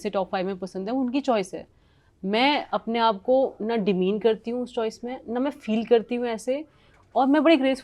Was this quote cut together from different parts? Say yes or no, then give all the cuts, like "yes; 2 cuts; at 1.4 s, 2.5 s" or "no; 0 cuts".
no; 0 cuts